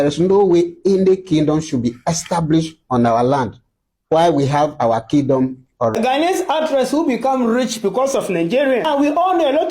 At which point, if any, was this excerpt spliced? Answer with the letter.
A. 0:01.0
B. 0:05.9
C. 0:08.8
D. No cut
B